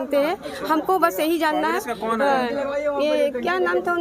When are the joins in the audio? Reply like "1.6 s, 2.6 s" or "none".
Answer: none

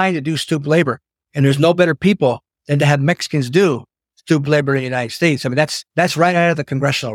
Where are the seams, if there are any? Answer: 5.8 s

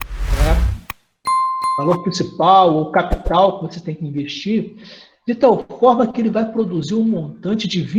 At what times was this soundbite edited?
1.8 s

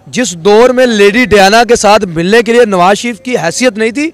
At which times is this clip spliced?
none

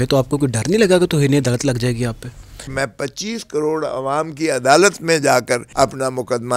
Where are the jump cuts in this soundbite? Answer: 2.7 s, 5.7 s

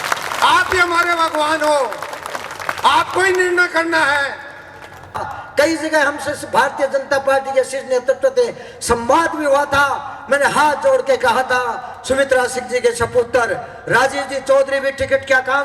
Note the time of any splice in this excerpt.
5.2 s

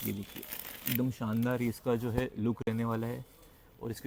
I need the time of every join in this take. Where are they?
none

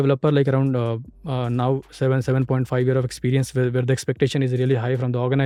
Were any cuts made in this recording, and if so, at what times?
none

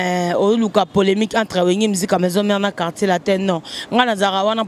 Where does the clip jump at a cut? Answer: none

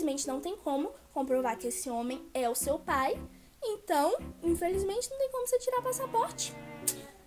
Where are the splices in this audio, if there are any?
none

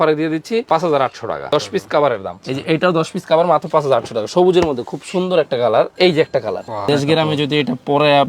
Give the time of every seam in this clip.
6.8 s

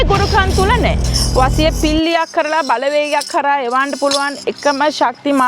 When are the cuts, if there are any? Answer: 1.0 s

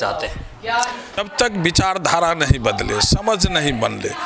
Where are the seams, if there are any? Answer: 1.2 s

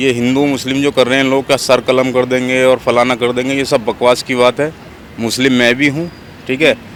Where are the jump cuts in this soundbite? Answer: none

